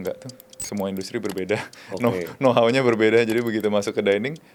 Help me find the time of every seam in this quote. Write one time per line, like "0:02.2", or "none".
none